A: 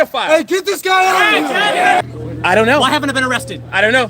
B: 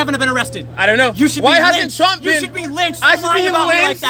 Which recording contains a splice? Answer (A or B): A